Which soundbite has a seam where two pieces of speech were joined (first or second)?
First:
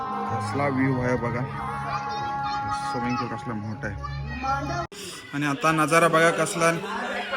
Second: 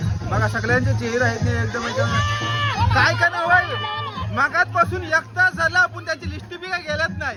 first